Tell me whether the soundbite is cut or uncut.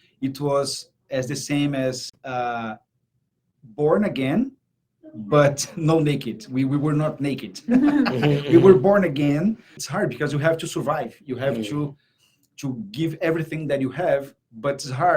cut